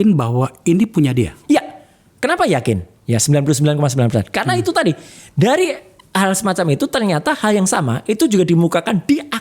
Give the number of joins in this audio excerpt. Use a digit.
0